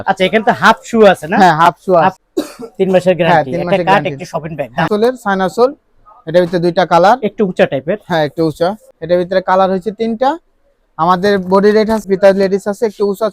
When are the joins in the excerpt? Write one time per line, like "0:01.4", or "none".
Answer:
0:02.2
0:04.9
0:08.9
0:12.1